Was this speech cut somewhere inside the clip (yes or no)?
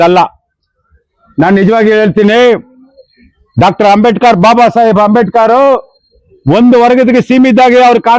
no